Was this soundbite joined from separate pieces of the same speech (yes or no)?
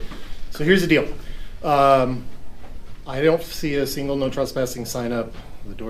no